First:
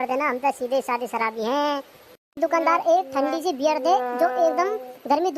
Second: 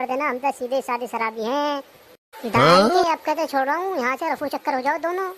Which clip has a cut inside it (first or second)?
first